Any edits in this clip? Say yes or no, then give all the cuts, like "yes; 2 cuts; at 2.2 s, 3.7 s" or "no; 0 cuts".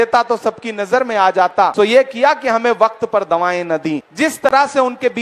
yes; 2 cuts; at 1.7 s, 4.1 s